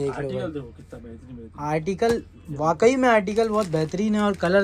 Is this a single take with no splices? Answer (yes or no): yes